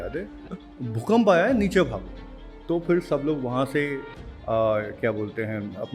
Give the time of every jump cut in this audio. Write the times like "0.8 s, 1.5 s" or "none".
none